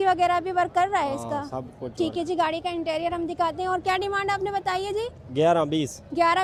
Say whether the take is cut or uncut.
uncut